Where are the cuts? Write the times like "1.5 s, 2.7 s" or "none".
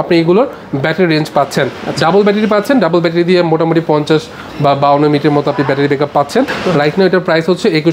none